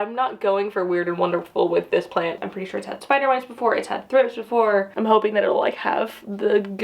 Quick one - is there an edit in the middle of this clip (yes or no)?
yes